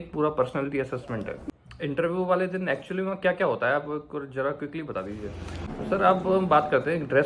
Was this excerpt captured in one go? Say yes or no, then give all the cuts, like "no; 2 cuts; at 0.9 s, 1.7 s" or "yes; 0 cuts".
no; 2 cuts; at 1.4 s, 5.7 s